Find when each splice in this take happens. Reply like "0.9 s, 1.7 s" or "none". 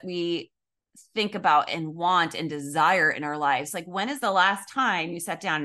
4.2 s